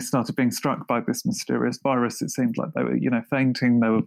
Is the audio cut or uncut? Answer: uncut